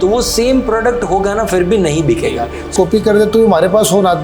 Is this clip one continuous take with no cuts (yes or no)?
no